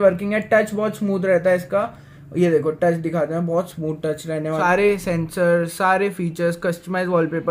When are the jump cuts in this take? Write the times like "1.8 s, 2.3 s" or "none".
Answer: 4.6 s

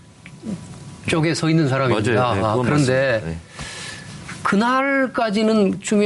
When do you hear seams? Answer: 2.0 s

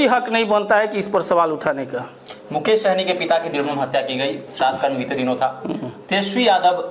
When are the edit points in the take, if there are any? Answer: none

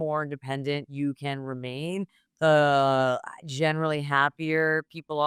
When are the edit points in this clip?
none

